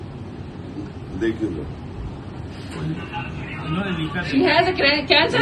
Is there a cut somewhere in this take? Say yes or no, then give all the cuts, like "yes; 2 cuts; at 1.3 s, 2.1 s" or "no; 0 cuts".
no; 0 cuts